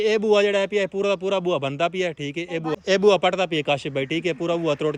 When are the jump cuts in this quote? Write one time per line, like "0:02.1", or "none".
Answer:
0:02.7